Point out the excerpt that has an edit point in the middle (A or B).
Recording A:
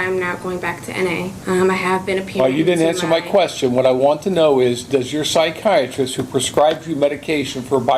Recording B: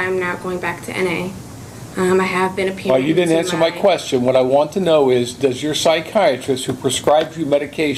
A